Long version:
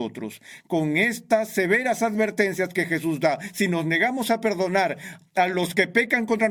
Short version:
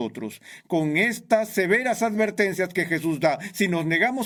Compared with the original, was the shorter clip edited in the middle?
no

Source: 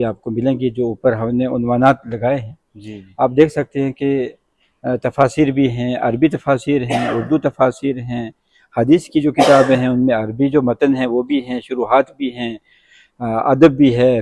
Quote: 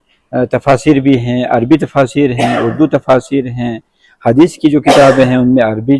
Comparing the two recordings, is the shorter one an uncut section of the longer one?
yes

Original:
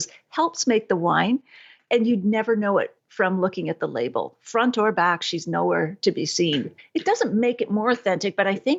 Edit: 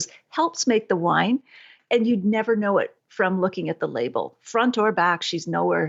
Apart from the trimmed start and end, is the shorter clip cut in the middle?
no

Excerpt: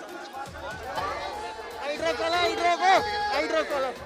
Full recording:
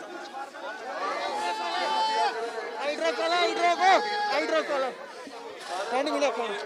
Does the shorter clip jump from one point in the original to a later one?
yes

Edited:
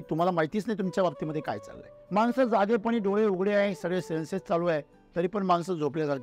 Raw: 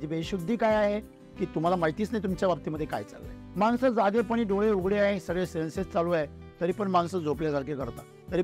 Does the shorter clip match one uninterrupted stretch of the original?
yes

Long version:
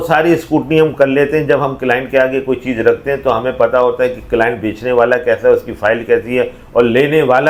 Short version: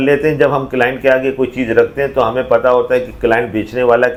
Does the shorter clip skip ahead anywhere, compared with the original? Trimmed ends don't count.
no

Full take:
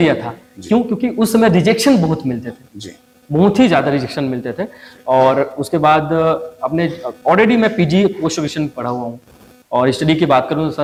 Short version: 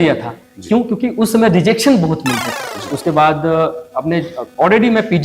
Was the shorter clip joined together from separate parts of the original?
yes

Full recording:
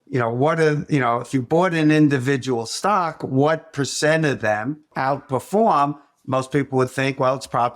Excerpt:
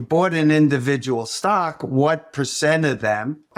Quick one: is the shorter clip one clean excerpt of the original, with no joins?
yes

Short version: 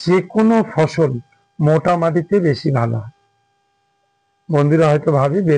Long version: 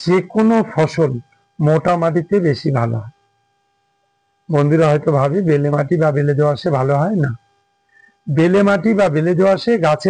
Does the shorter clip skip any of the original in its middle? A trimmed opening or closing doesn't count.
no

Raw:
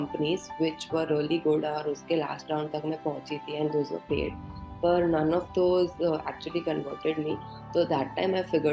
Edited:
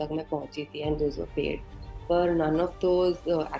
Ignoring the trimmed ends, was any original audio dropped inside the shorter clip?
no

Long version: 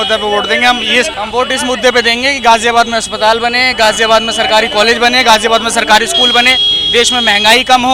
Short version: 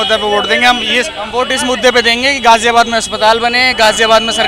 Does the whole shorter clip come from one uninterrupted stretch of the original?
yes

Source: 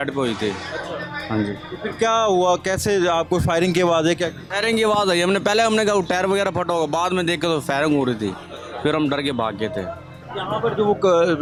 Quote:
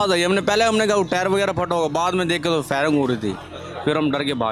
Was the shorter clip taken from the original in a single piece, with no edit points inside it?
yes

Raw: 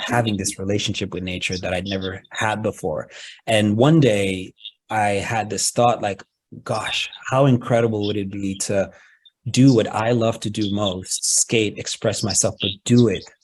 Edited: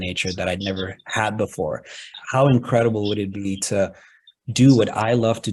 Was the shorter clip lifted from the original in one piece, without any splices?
no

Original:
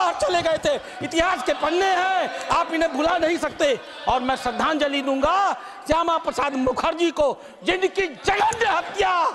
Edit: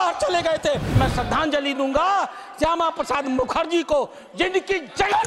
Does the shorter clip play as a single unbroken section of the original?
no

